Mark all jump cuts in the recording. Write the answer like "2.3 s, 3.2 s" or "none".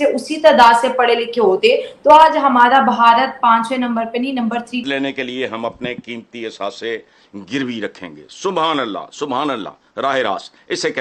4.8 s

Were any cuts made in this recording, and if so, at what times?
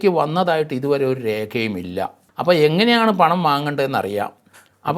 2.2 s

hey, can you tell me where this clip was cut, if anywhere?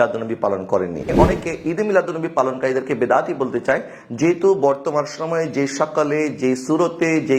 1.1 s

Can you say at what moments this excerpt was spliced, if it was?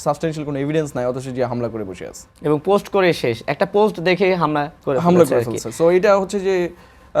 none

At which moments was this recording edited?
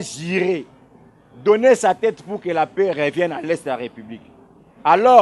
none

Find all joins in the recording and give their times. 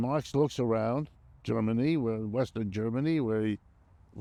none

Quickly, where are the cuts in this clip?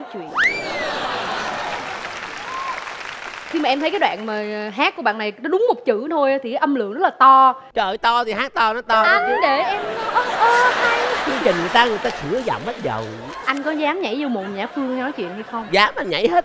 none

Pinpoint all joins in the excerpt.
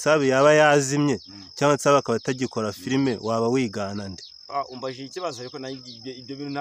none

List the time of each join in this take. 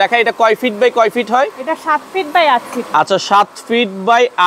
none

